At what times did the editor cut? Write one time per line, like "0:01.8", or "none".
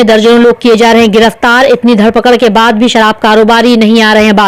none